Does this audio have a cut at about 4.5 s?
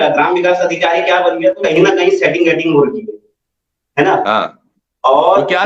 no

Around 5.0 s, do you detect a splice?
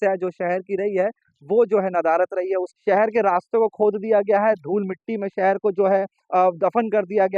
no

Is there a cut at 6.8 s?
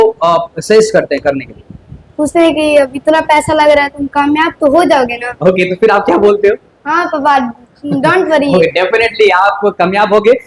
no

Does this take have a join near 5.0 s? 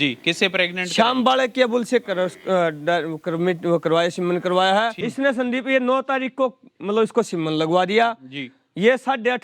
yes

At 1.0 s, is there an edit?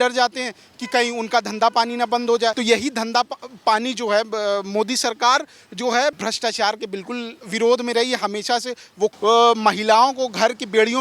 no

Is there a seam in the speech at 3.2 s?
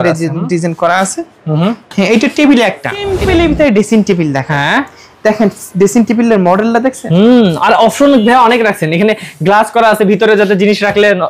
yes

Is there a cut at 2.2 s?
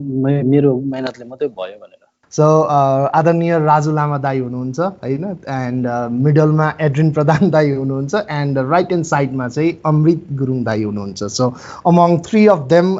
yes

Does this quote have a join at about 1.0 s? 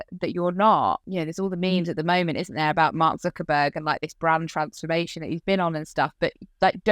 yes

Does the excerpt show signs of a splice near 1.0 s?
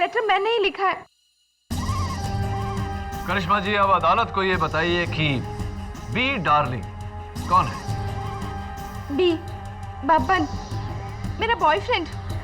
yes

